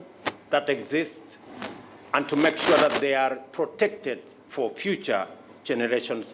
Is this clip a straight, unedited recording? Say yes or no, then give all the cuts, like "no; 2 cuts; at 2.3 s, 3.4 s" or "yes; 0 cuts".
yes; 0 cuts